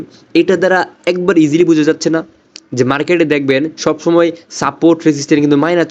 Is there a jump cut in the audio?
no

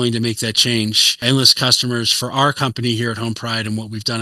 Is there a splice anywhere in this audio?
yes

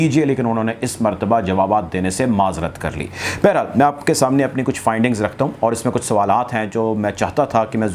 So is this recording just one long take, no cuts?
yes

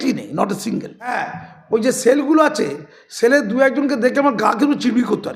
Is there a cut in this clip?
no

